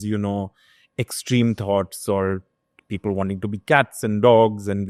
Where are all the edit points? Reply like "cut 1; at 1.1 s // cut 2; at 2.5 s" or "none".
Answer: none